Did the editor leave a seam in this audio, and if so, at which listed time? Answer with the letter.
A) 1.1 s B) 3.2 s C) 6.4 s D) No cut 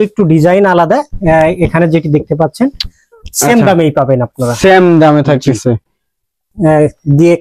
C